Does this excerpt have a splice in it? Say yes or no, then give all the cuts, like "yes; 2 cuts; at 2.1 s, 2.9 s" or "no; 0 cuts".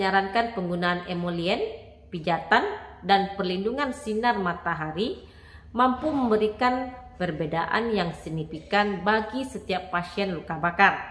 no; 0 cuts